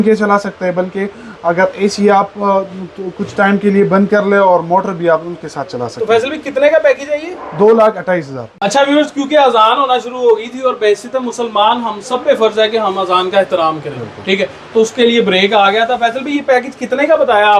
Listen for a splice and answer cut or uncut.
uncut